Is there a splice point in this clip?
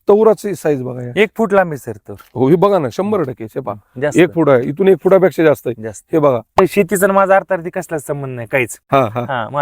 yes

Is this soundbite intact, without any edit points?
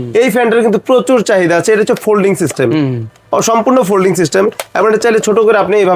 yes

